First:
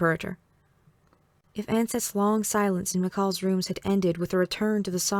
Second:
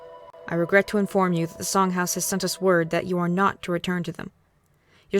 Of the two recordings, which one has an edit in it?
second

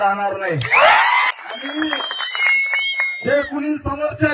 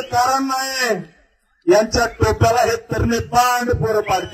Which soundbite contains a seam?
first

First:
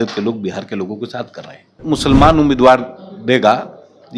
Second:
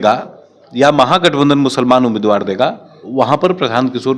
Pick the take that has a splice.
first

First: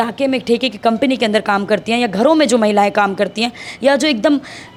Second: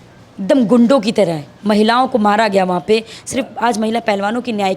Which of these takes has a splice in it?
second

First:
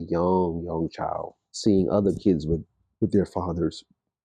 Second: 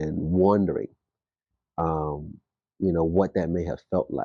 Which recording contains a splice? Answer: first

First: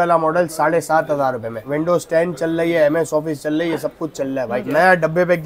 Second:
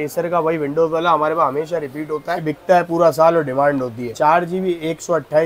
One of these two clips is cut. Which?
first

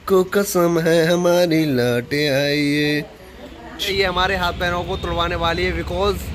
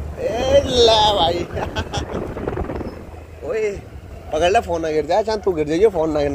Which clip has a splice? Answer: first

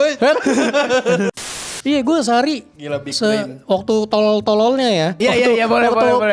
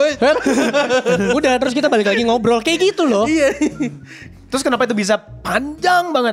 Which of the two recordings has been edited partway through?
first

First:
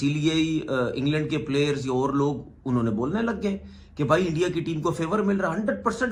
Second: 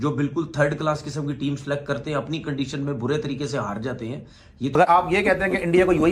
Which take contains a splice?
second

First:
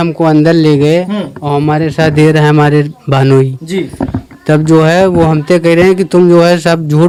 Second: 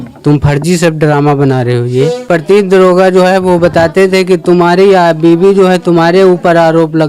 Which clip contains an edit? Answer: second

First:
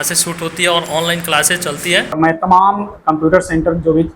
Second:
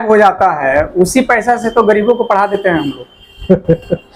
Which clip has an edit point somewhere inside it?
first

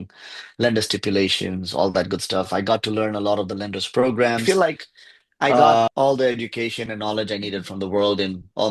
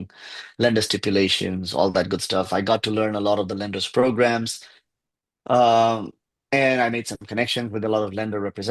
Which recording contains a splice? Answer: first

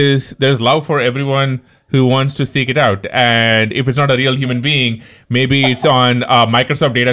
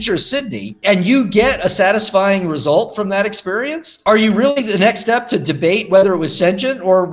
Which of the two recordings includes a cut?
second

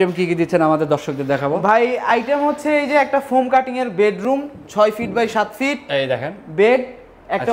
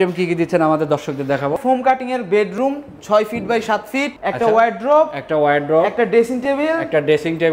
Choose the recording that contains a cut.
second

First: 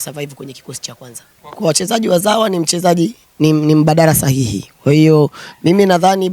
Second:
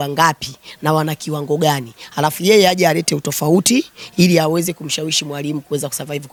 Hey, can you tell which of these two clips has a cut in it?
first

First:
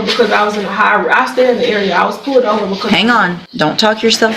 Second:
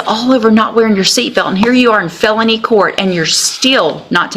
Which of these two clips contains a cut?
first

